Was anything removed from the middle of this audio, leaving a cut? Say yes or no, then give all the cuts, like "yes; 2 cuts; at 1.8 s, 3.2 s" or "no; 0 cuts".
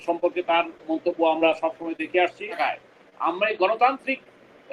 yes; 1 cut; at 2.6 s